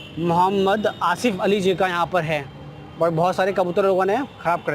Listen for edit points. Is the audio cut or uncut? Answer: uncut